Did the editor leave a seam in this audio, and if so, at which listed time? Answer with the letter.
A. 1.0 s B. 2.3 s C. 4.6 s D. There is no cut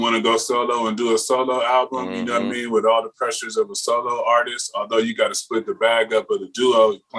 D